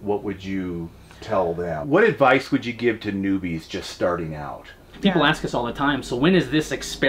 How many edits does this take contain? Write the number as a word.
two